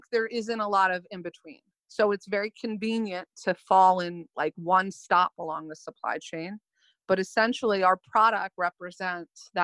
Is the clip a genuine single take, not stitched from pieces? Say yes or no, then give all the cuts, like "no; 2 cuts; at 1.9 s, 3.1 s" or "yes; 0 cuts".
yes; 0 cuts